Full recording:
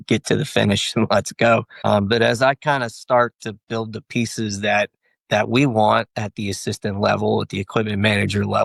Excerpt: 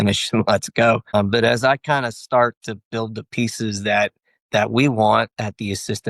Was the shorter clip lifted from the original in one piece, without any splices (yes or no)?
no